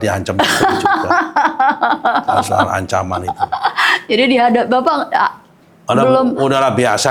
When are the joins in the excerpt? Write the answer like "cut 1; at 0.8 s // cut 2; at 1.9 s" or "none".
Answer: none